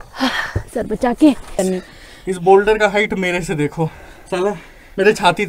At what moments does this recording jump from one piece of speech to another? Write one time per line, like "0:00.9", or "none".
0:01.6